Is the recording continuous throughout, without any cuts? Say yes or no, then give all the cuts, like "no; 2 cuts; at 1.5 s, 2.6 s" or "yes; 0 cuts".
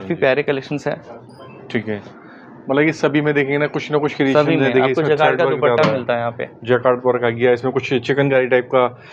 yes; 0 cuts